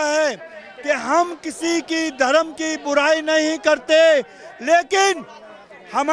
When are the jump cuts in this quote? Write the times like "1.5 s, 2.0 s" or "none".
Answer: none